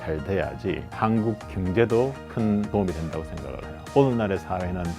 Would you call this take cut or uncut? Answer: cut